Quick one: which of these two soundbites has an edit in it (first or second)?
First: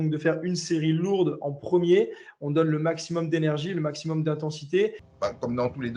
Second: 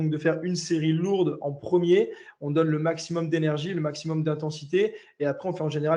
first